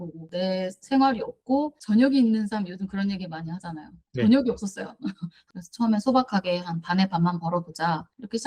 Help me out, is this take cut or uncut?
uncut